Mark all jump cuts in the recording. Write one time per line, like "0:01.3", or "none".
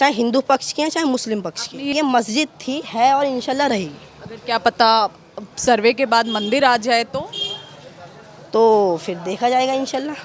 0:01.9